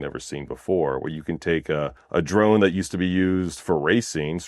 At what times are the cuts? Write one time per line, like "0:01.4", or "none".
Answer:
0:02.0